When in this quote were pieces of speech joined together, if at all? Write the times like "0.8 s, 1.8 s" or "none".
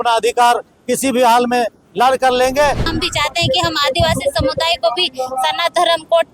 2.9 s